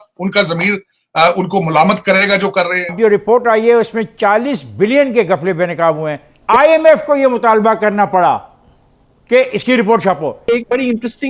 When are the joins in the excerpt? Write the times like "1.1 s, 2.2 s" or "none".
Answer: 2.9 s, 6.5 s, 10.4 s